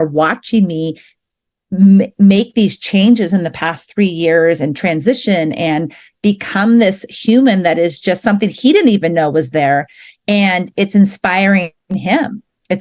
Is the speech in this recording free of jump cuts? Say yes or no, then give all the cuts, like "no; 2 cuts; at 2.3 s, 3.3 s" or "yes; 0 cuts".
yes; 0 cuts